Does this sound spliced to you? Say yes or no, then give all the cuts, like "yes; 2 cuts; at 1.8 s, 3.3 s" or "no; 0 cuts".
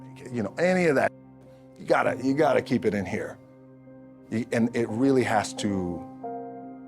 yes; 1 cut; at 6.0 s